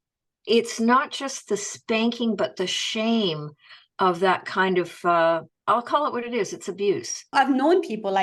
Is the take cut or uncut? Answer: cut